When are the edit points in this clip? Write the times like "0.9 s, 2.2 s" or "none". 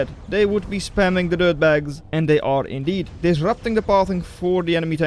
2.0 s, 3.1 s